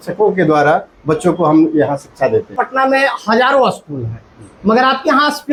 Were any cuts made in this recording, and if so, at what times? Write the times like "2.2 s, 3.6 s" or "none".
none

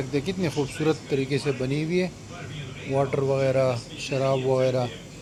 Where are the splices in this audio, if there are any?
none

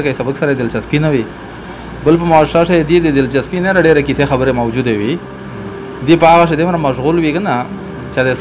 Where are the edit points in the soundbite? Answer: none

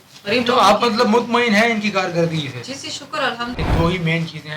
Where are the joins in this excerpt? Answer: 3.6 s

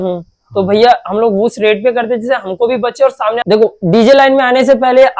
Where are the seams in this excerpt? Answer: 3.4 s

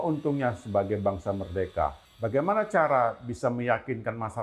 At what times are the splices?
2.1 s

